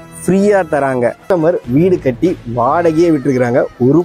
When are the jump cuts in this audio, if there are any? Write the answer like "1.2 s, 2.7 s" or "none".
1.2 s